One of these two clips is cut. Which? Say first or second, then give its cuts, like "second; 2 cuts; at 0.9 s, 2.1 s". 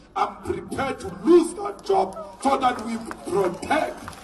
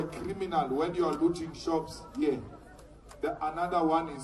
second; 1 cut; at 1.7 s